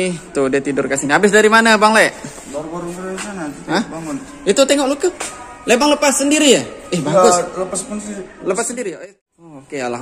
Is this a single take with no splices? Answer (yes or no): no